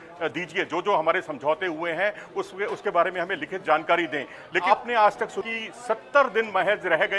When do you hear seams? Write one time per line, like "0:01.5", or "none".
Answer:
0:04.6